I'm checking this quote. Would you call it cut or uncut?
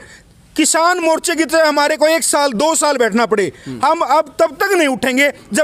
uncut